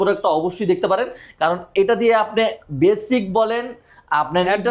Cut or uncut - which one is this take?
uncut